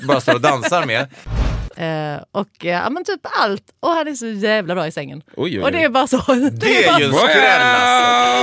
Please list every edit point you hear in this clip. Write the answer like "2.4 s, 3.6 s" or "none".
1.2 s